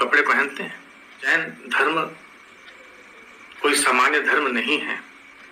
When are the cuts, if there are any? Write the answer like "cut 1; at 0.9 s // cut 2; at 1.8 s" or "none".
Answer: cut 1; at 1.3 s